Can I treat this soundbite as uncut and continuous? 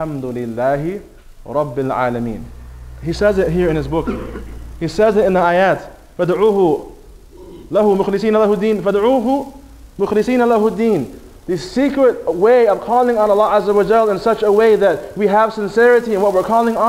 no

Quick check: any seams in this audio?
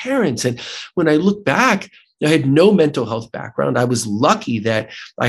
no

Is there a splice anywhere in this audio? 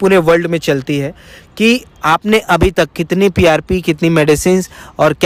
no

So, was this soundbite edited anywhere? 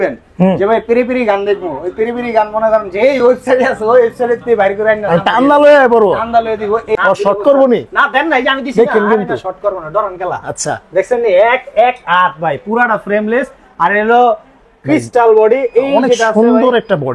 yes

